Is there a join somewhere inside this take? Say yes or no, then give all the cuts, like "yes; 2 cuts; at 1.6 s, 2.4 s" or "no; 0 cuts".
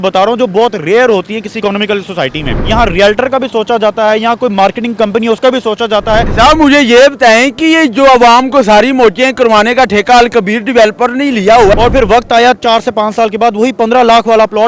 yes; 3 cuts; at 2.6 s, 6.3 s, 11.7 s